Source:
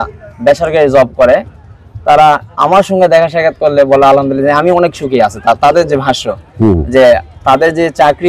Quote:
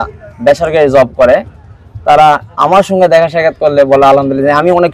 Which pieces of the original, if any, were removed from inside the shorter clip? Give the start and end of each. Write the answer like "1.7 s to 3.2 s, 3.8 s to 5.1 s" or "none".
none

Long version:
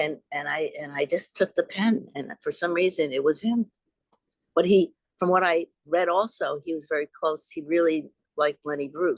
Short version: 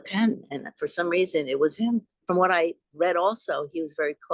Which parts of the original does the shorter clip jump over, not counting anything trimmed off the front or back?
3.8 s to 5.1 s

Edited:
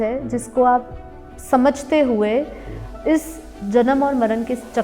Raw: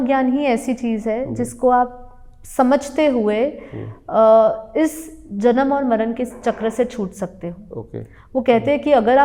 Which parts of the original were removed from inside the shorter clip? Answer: 4.0 s to 4.6 s

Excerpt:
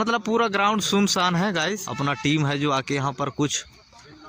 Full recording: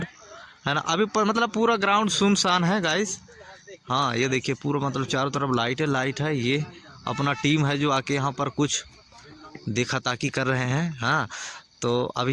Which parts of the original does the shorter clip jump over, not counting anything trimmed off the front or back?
3.1 s to 7.1 s

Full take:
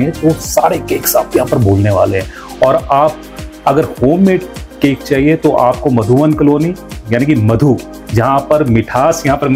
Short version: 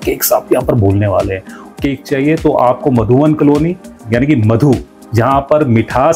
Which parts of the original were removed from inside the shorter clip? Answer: 2.4 s to 4.6 s

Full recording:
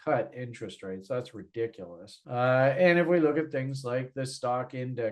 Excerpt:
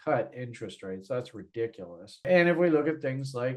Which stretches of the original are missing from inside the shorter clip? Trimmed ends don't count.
2.2 s to 2.8 s

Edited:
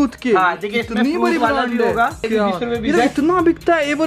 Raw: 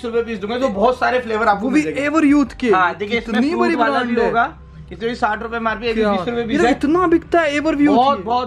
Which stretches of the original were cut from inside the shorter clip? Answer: 4.6 s to 5.9 s

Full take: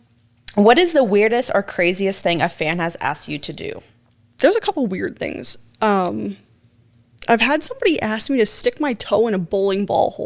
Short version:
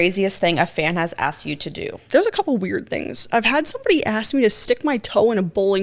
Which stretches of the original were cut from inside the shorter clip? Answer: 3.8 s to 4.3 s, 5.4 s to 7.1 s

